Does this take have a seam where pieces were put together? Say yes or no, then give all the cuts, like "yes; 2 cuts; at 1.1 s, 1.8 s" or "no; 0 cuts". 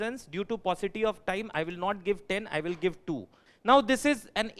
yes; 1 cut; at 3.5 s